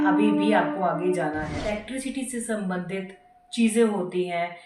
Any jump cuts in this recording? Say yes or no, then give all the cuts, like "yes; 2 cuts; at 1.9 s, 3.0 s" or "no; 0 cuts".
yes; 1 cut; at 1.7 s